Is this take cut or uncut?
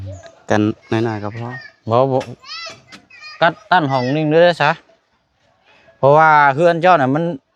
uncut